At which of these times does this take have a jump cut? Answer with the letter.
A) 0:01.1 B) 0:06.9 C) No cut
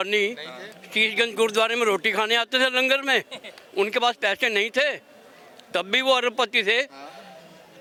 C